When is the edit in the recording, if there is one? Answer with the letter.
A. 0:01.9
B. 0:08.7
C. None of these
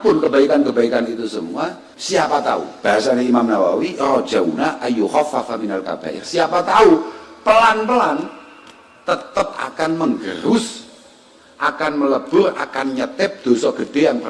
A